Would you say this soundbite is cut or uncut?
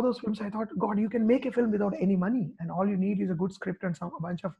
uncut